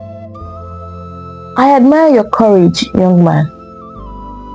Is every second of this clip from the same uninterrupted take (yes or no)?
yes